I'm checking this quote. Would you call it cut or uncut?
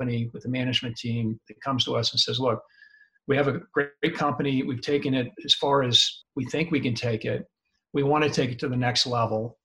cut